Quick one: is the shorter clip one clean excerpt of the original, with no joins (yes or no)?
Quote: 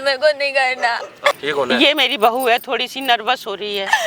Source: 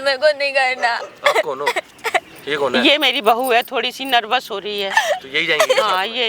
no